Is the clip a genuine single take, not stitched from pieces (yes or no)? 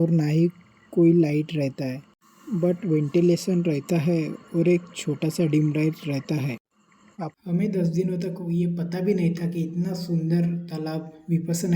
no